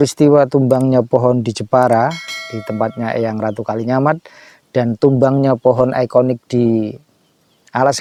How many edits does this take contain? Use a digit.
0